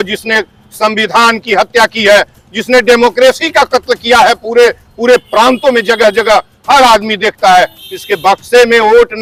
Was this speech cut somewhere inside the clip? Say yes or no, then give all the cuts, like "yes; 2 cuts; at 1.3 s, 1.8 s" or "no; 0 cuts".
no; 0 cuts